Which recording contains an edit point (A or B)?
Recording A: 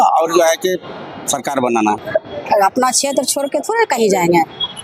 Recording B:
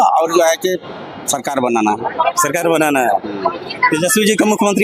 A